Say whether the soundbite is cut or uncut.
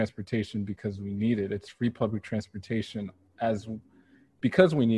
uncut